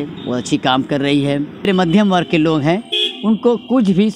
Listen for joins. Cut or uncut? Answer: cut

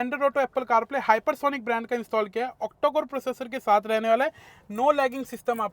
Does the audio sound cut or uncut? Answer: uncut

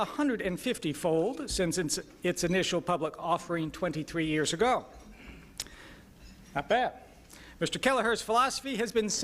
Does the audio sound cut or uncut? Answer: cut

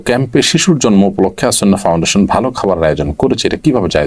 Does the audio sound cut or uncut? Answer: uncut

